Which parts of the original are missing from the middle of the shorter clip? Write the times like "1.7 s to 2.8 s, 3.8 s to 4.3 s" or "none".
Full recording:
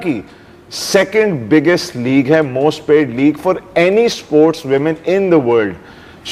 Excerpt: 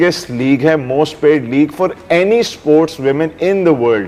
none